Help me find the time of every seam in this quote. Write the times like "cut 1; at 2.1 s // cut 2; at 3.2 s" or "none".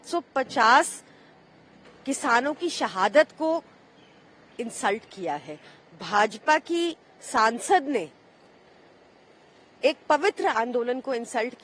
none